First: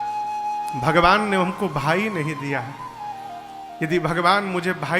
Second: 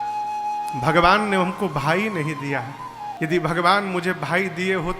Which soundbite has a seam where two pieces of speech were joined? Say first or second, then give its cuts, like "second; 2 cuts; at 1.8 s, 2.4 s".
second; 1 cut; at 3.1 s